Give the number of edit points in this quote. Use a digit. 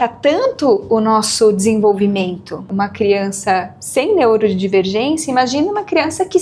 1